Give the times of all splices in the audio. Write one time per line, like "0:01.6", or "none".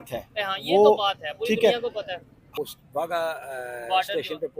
0:02.5